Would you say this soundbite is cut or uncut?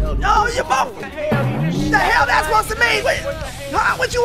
cut